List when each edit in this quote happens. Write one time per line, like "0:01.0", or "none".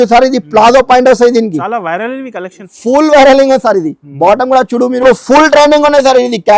0:05.0